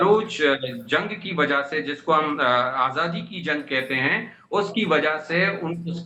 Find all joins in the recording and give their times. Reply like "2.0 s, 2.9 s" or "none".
none